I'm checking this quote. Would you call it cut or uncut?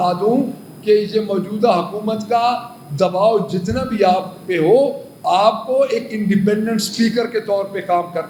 uncut